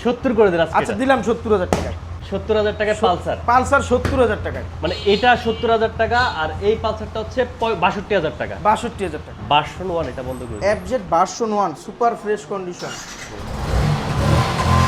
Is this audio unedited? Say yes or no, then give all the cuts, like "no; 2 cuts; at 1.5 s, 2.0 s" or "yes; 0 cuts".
yes; 0 cuts